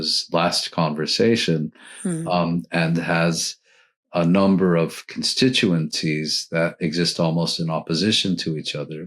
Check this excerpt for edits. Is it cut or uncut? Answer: cut